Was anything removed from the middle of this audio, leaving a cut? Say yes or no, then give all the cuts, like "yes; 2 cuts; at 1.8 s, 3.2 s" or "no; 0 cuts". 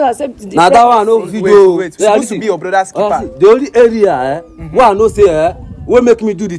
yes; 1 cut; at 1.9 s